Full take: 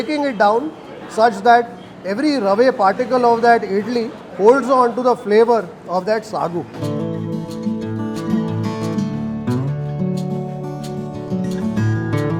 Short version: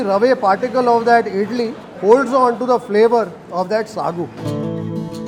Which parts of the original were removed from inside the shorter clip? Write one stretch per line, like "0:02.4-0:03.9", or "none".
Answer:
none